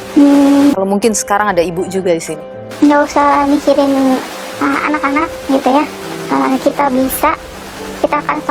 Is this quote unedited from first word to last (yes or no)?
yes